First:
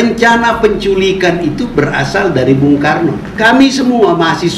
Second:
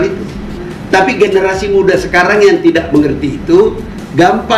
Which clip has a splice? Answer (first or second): first